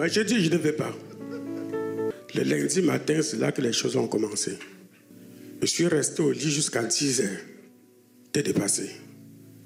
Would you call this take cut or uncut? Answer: cut